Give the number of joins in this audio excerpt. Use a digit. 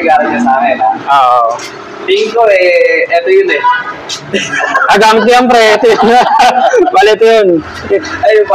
1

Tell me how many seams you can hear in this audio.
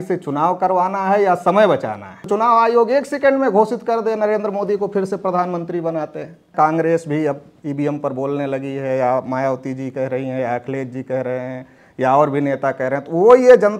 2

